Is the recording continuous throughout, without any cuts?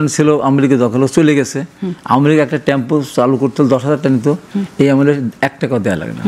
yes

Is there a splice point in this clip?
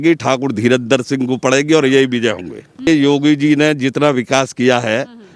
yes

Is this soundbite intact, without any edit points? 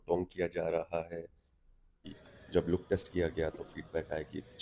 no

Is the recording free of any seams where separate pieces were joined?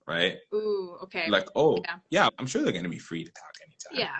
no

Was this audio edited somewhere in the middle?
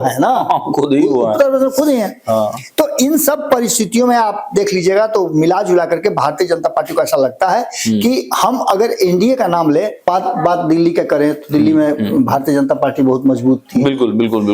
yes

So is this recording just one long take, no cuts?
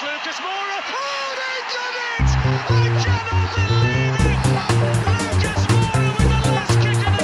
yes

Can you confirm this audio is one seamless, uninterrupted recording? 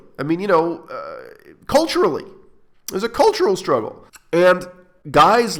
yes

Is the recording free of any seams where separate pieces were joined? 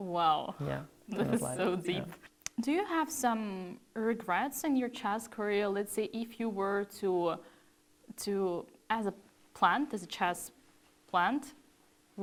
yes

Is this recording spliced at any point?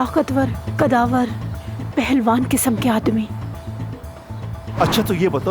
no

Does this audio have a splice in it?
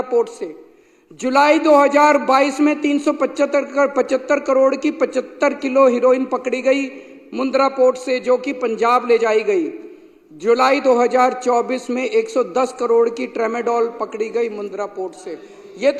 no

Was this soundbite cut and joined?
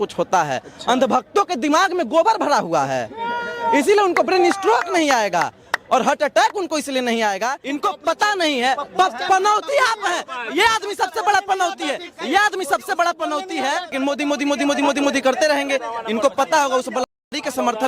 yes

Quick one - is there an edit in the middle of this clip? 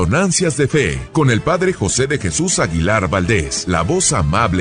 yes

